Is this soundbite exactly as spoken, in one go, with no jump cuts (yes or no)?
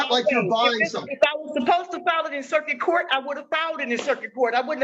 yes